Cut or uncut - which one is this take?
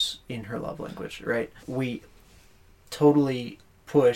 cut